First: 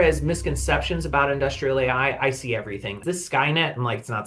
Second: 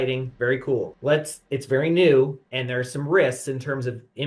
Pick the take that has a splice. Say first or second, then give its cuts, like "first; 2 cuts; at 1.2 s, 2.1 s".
first; 1 cut; at 3.0 s